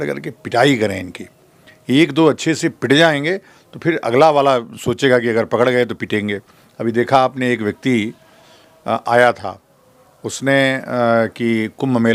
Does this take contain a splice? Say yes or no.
no